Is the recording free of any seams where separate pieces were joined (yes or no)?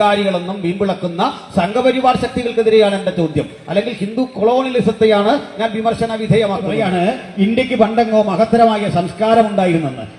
no